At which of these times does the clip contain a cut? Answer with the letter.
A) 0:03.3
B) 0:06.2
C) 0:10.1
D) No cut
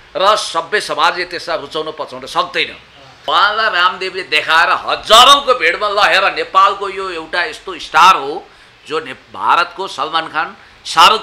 A